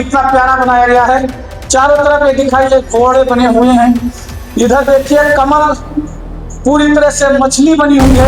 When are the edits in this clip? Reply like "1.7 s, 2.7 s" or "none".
none